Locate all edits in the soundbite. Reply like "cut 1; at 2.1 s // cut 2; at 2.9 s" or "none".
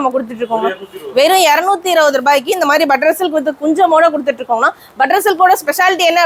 none